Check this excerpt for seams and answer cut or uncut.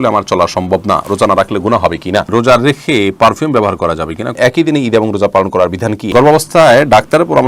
cut